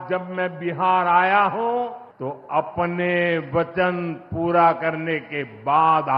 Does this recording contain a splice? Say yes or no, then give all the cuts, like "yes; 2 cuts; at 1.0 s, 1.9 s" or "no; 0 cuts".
yes; 1 cut; at 2.1 s